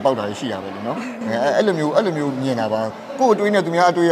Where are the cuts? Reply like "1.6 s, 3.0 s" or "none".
none